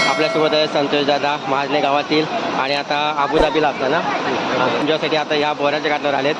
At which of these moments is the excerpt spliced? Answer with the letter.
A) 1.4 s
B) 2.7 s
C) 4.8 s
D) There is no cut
C